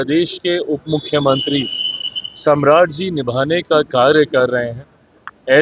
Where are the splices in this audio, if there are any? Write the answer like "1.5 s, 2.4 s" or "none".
none